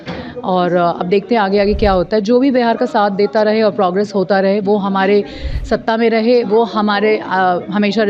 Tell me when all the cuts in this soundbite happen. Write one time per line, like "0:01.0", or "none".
none